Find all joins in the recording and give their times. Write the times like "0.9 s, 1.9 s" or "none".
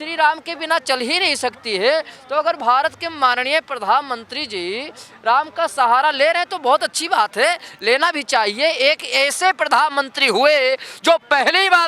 none